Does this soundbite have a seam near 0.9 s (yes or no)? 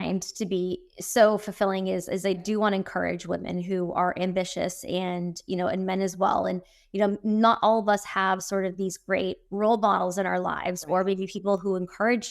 yes